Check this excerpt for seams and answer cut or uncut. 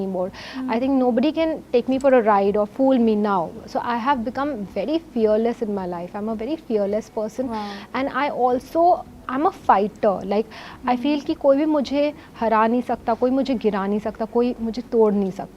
uncut